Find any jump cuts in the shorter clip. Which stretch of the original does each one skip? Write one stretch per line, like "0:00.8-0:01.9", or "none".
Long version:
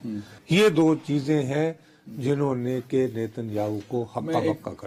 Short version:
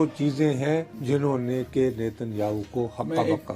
0:01.8-0:02.1